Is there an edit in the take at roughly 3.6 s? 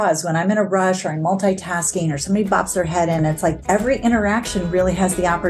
yes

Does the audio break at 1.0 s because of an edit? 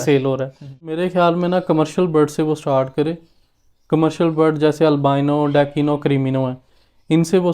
yes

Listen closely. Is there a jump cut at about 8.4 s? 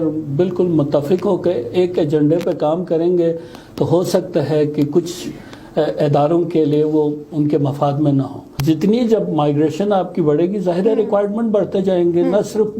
yes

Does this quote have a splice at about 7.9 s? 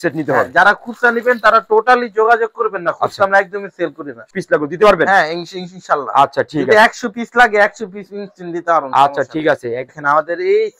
no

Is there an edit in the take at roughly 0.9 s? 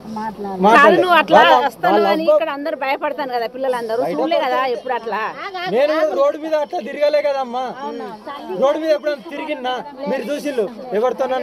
yes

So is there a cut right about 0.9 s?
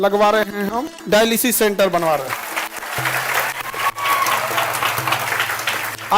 yes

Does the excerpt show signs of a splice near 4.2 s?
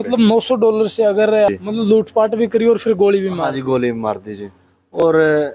no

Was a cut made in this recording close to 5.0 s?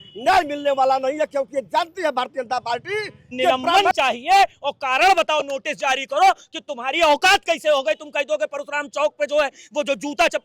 no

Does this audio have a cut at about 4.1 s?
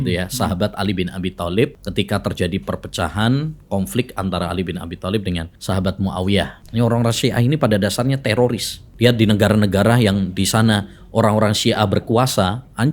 no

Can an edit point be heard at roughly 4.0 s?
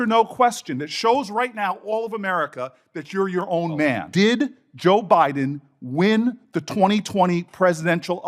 yes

